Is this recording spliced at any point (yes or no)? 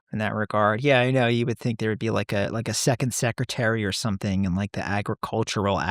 no